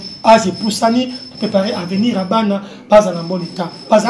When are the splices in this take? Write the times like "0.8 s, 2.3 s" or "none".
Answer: none